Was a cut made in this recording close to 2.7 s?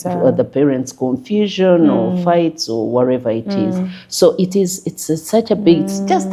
no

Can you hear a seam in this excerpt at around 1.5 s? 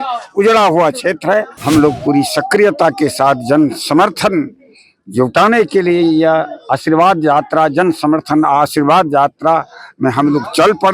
yes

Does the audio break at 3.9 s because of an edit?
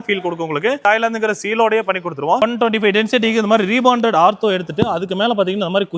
no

